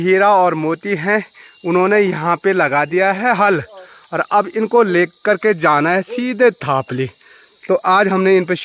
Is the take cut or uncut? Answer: uncut